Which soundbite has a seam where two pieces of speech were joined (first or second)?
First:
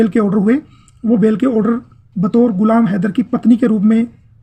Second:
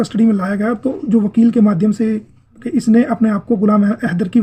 second